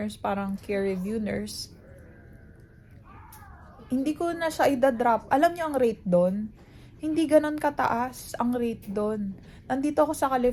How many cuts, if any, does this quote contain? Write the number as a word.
zero